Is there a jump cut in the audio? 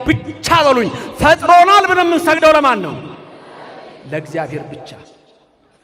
no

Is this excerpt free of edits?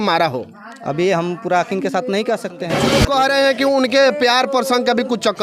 no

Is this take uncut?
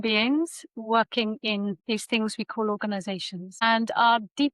no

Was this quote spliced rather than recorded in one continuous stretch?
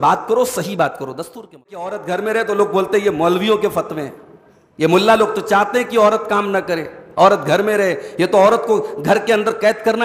yes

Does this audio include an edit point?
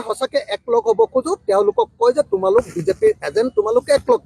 no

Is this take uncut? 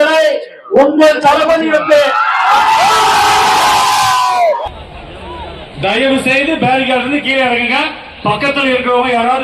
no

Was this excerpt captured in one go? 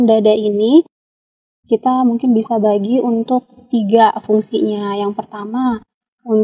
yes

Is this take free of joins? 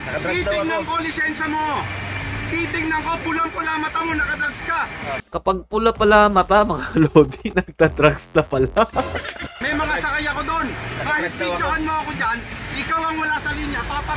no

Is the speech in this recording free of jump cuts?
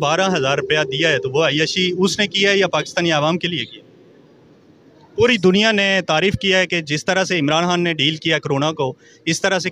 yes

